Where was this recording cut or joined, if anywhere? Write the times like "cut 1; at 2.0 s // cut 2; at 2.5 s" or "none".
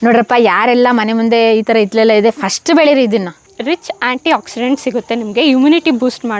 cut 1; at 3.5 s